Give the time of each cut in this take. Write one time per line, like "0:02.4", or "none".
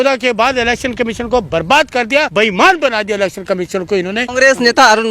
0:02.3
0:04.3